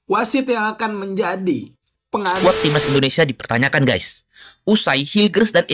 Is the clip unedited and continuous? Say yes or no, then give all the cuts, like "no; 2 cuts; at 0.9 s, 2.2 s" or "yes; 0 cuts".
no; 1 cut; at 2.4 s